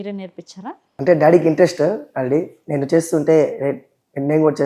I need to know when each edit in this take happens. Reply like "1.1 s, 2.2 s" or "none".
0.9 s